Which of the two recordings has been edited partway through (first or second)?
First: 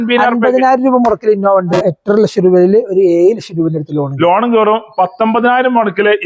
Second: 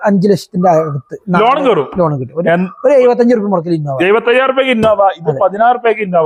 first